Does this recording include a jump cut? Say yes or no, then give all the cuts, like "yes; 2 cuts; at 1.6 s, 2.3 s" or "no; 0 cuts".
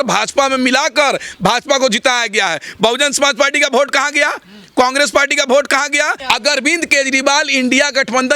yes; 1 cut; at 6.2 s